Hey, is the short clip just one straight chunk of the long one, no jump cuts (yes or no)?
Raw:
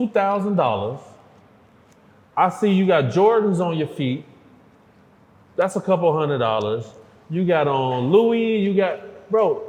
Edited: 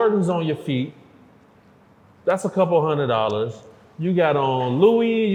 yes